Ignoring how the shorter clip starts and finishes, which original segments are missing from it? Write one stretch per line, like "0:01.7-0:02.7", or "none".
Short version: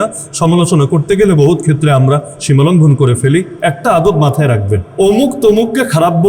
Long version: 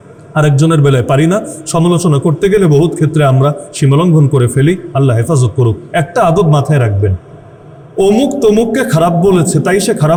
0:04.8-0:05.8
0:07.2-0:07.9

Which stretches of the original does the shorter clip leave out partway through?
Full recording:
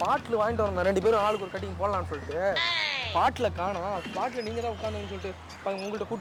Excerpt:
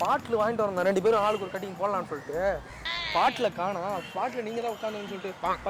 none

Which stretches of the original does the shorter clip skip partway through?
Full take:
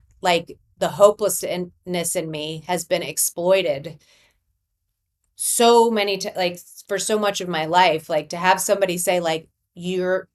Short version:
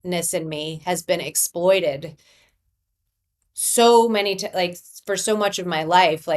none

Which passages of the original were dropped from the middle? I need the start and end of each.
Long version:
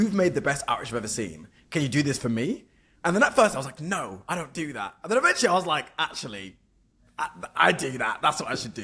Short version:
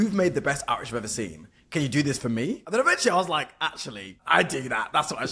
0:02.6-0:05.0
0:06.5-0:07.4

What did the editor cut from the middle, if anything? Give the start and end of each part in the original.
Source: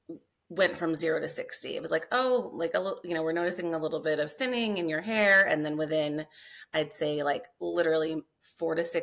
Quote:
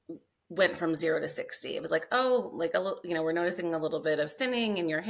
none

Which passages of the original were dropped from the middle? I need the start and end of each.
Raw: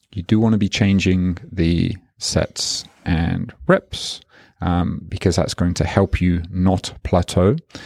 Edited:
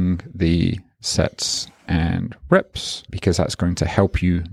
0:04.2-0:05.1

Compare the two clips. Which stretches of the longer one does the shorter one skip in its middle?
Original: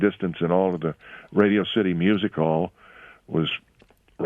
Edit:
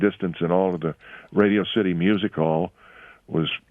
none

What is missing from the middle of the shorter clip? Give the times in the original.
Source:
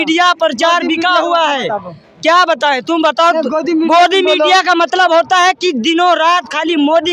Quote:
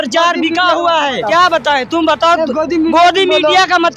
0:01.7-0:02.2

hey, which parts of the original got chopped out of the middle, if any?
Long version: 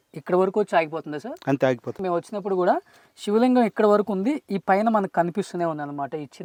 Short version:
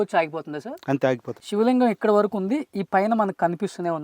0:01.9-0:03.1

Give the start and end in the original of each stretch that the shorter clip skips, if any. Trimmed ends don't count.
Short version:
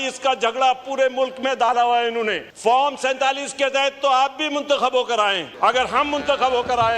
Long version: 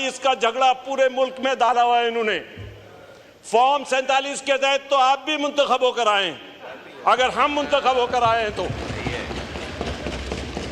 0:02.5-0:03.4
0:06.3-0:06.9

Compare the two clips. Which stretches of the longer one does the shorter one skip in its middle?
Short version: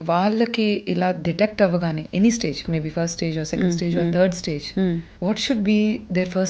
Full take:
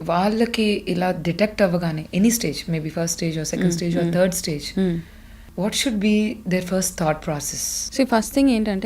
0:05.1-0:05.5

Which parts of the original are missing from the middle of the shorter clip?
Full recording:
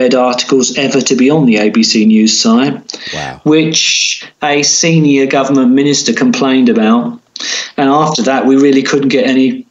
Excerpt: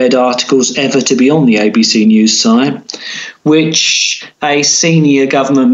none

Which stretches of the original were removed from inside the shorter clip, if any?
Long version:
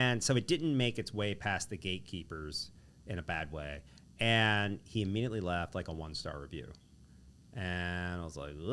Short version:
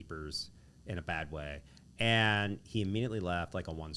none

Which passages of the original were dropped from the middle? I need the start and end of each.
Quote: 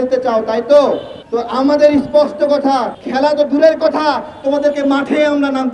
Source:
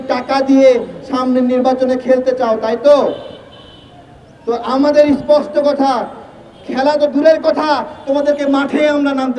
0:03.3-0:04.3
0:06.1-0:06.6

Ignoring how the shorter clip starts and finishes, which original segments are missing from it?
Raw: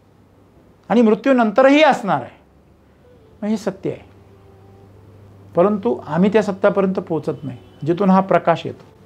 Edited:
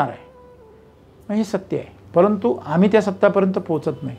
0:04.1-0:05.4

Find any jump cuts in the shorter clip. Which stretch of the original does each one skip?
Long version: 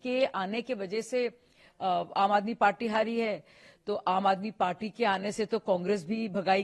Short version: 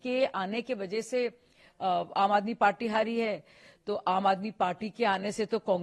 none

